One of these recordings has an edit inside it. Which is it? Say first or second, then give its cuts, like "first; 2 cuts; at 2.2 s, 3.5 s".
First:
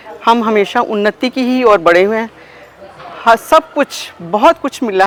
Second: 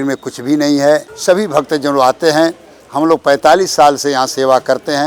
second; 1 cut; at 1.1 s